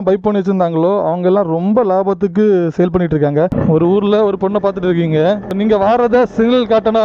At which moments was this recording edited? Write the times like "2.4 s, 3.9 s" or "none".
3.6 s, 5.5 s